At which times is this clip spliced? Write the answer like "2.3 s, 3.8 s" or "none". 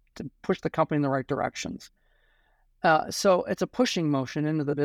none